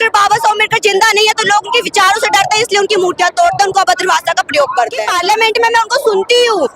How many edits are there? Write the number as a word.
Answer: one